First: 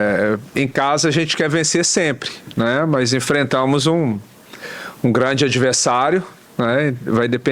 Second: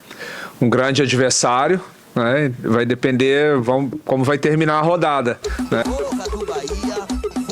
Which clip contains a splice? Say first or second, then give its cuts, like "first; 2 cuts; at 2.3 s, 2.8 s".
second; 1 cut; at 5.5 s